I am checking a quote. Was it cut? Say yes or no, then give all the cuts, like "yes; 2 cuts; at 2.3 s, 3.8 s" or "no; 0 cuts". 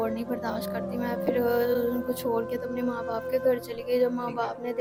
no; 0 cuts